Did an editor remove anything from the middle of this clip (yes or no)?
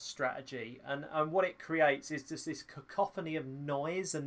no